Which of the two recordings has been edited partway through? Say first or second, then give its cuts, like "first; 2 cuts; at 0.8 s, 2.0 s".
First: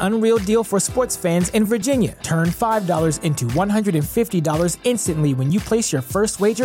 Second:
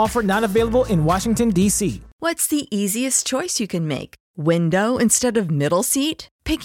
second; 1 cut; at 2.1 s